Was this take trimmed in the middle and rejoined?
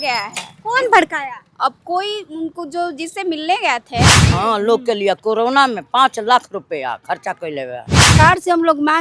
yes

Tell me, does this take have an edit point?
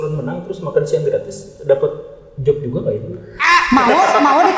no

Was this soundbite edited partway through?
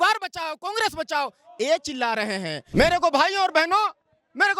yes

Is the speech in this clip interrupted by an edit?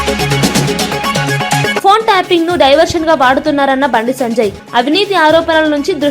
yes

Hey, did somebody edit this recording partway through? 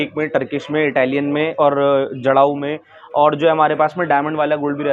no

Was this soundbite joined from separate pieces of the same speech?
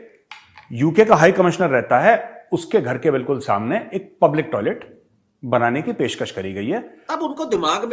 yes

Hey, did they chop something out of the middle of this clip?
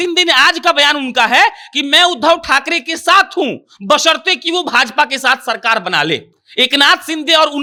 no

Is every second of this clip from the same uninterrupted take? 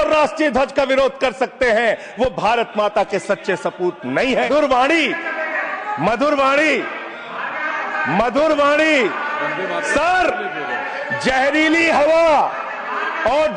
no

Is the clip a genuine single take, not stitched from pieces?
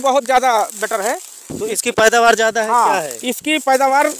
no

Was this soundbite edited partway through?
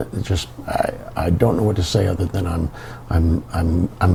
no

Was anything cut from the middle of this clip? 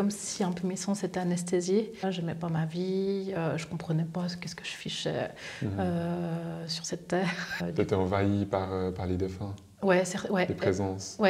yes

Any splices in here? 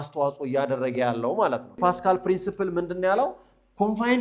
yes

